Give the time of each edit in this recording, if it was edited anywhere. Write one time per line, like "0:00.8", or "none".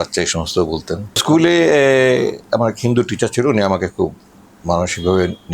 0:01.2